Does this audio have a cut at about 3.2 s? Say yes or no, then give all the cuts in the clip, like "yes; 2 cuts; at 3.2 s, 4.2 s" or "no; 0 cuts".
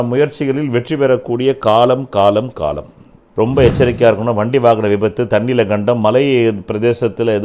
yes; 1 cut; at 3.2 s